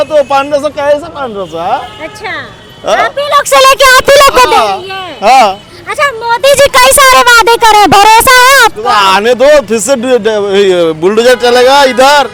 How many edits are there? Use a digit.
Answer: 0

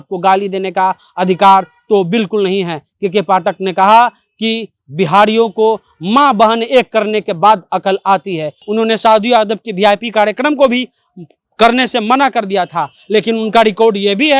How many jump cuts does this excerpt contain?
1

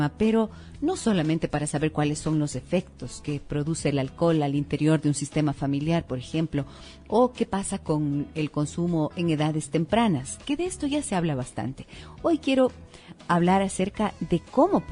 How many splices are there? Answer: 0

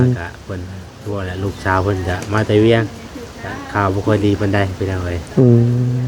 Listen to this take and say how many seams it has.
0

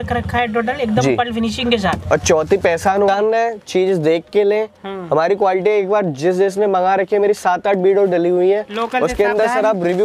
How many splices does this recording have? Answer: 1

